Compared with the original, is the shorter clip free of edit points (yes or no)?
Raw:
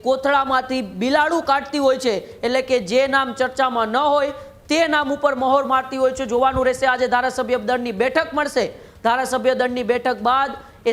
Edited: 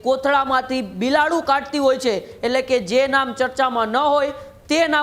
yes